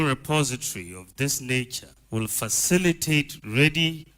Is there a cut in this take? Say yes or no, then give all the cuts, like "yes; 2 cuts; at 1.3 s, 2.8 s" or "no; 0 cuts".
no; 0 cuts